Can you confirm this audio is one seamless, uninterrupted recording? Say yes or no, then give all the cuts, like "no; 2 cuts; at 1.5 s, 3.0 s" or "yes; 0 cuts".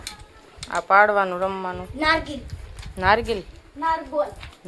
yes; 0 cuts